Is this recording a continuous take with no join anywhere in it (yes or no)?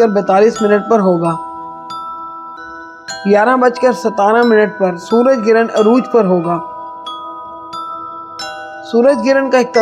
no